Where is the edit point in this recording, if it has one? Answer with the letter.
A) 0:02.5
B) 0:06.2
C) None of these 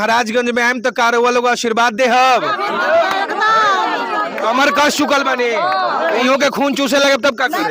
B